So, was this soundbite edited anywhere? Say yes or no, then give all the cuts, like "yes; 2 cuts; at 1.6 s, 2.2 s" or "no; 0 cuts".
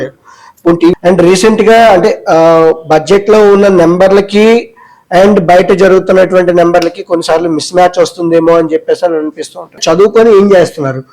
yes; 2 cuts; at 0.9 s, 9.8 s